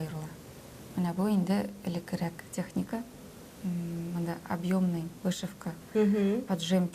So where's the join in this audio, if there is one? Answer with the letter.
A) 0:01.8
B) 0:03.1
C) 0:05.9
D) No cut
D